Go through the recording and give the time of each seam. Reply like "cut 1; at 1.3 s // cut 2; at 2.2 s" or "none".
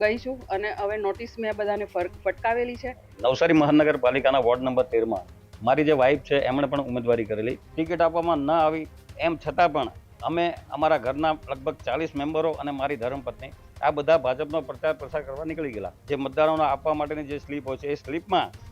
cut 1; at 3.1 s // cut 2; at 7.6 s // cut 3; at 15.9 s